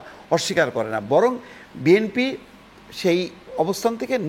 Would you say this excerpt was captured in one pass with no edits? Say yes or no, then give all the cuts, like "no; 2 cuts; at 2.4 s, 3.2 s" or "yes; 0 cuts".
yes; 0 cuts